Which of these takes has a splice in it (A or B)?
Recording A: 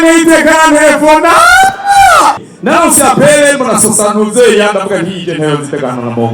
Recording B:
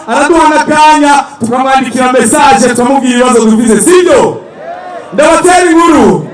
A